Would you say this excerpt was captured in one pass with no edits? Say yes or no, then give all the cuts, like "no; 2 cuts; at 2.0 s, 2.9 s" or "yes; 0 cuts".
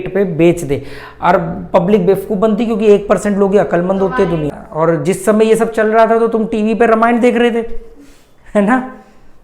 no; 1 cut; at 4.6 s